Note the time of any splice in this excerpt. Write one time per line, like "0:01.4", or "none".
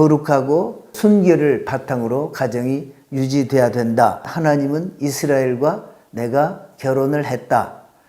0:00.9
0:04.3

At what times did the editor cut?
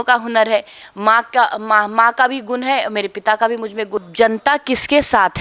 0:04.0

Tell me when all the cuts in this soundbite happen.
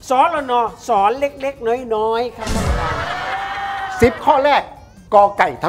0:03.9

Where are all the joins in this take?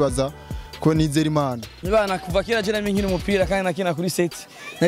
0:01.7

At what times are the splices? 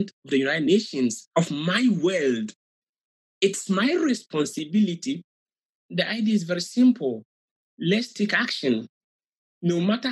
0:05.8

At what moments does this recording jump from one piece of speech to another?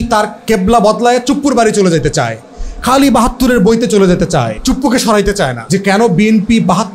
0:04.5
0:05.6

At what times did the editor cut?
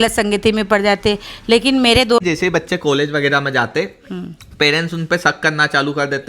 0:02.2

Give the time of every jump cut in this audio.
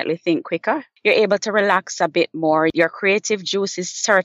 0:00.9
0:02.7

